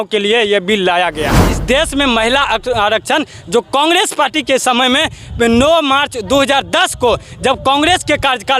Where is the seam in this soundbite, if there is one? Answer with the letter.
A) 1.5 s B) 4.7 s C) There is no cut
A